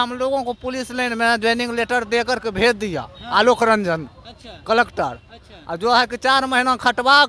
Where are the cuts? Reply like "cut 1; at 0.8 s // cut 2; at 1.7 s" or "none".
none